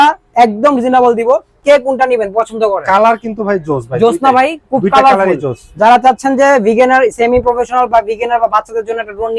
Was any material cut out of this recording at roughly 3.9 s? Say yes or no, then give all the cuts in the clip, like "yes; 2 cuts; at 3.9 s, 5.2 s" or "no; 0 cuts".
no; 1 cut; at 1.6 s